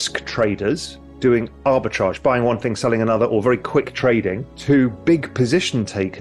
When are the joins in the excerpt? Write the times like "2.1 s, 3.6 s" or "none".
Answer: none